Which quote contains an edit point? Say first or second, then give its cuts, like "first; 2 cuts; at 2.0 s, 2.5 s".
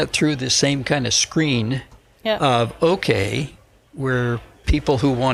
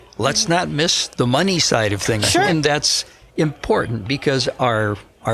second; 2 cuts; at 1.0 s, 2.5 s